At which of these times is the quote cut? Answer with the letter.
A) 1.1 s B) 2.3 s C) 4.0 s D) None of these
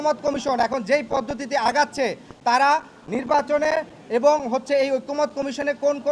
D